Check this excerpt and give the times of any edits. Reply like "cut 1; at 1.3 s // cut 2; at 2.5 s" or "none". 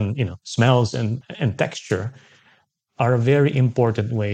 cut 1; at 1.2 s